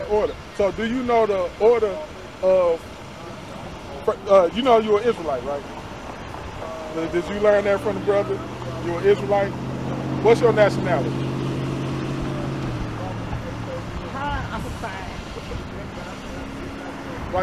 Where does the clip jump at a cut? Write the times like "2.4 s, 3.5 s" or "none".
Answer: none

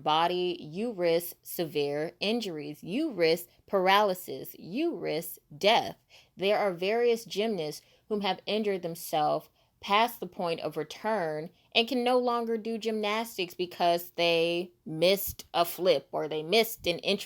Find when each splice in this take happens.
none

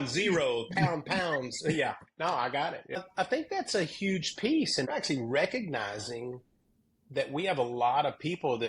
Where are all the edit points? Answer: 3.0 s, 4.9 s

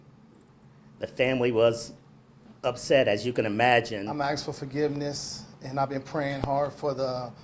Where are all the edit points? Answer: 4.0 s

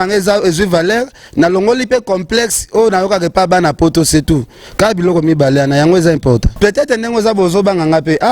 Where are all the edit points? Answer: 6.5 s

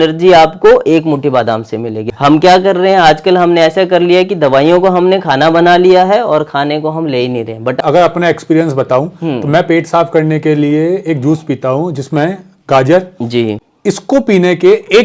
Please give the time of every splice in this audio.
2.0 s, 7.8 s, 13.6 s

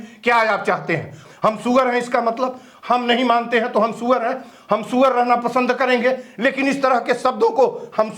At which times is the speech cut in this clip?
1.2 s

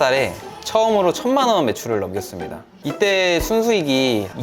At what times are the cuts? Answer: 2.8 s

